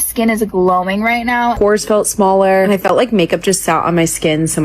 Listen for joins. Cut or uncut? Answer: cut